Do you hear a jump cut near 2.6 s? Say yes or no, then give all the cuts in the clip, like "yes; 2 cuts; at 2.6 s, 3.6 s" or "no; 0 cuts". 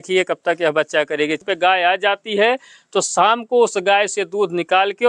no; 1 cut; at 1.4 s